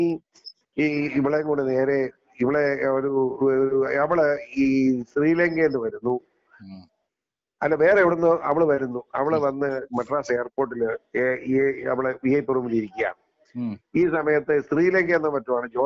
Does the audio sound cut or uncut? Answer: uncut